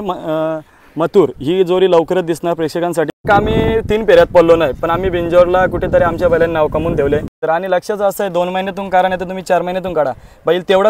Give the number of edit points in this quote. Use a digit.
2